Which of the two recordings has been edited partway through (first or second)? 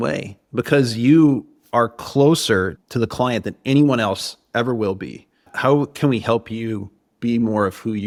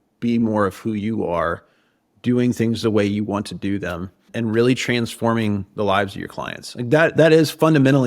second